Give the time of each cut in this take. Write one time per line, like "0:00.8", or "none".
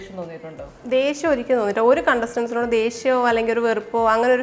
none

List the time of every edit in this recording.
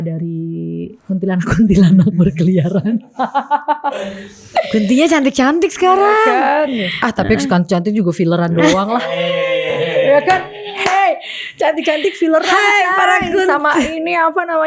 0:01.0

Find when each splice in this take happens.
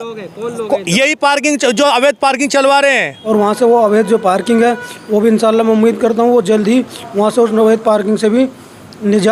0:03.1

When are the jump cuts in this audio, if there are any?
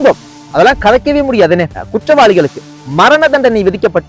0:01.8

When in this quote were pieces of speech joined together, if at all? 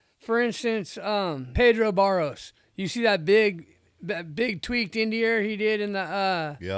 0:01.4

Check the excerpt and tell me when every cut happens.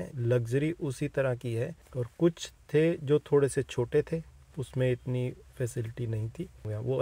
none

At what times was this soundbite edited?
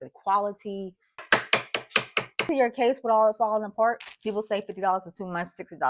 0:01.2
0:02.4
0:04.0

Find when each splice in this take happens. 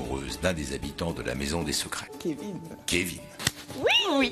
0:03.3

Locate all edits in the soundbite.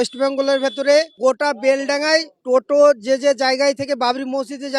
0:01.1
0:02.3

